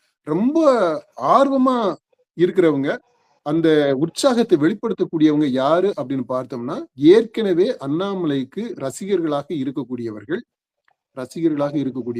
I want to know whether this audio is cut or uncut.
uncut